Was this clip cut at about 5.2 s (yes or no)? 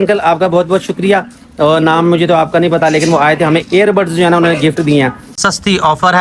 yes